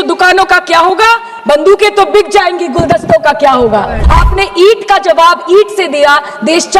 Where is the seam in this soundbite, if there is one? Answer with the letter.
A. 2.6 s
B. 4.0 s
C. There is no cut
B